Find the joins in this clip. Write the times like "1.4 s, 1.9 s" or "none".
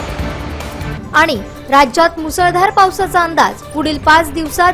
0.9 s